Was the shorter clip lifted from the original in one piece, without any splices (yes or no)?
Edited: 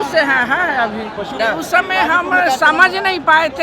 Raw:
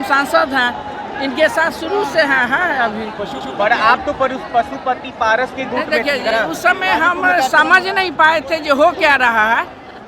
no